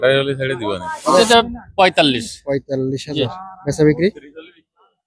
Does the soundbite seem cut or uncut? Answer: cut